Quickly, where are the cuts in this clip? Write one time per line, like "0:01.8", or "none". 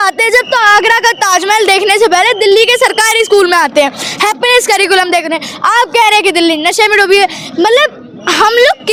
none